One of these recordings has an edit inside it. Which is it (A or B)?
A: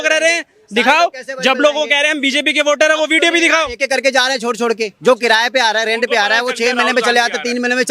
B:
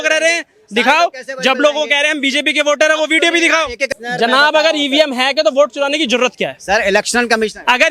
B